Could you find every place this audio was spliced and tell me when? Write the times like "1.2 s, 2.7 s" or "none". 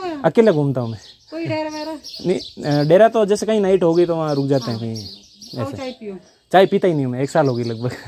none